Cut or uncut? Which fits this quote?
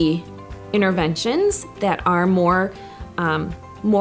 uncut